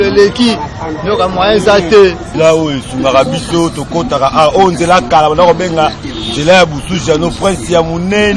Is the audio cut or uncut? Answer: cut